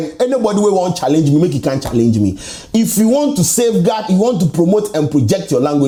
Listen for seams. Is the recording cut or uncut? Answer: uncut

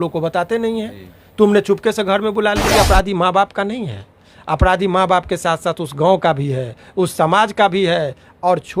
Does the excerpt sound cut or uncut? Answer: cut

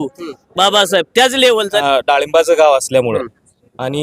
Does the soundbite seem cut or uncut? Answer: cut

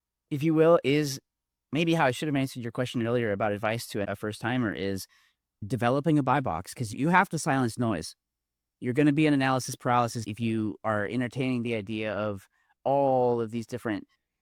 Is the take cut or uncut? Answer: uncut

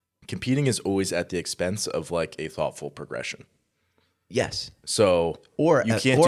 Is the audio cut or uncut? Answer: uncut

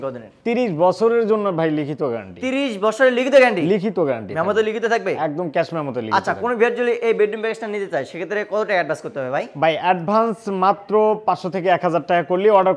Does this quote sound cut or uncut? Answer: uncut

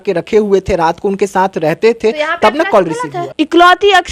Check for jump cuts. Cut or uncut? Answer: cut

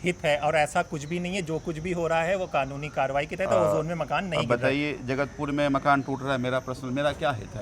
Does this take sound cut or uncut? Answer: uncut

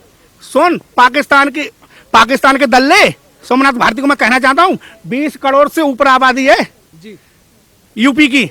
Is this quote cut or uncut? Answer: uncut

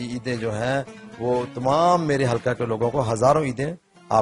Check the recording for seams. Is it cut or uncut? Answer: uncut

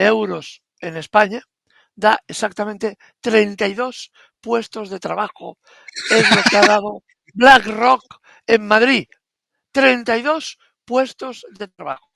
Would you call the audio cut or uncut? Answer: uncut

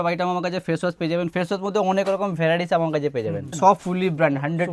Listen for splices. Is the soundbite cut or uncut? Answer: cut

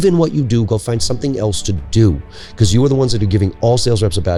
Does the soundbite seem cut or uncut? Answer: uncut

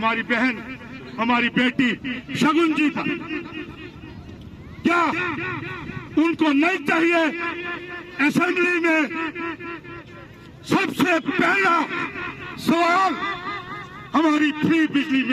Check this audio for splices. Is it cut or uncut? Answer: uncut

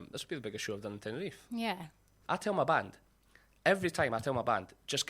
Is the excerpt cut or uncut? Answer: cut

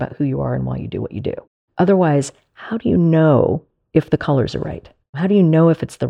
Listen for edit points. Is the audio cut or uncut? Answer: cut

